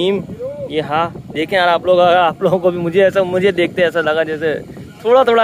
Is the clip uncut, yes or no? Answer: yes